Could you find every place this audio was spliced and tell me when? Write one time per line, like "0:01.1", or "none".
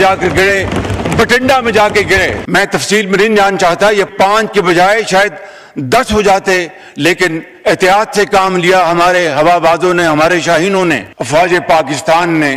0:02.4
0:04.1
0:11.1